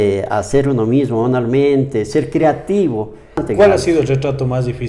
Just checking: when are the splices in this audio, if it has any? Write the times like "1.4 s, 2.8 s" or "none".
3.4 s